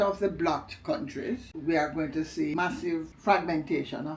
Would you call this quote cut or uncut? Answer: cut